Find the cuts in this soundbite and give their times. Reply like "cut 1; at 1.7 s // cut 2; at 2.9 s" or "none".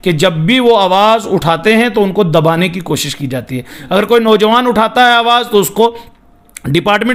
none